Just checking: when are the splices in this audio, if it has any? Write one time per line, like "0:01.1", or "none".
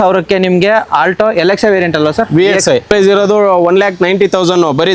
0:02.9